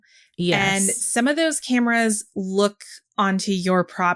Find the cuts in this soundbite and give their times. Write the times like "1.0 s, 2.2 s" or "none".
none